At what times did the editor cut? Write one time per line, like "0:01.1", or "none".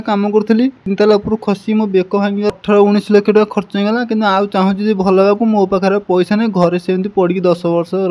0:00.8
0:02.5